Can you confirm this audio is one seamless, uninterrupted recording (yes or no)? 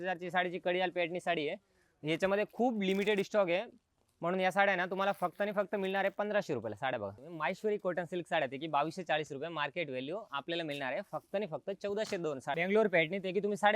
no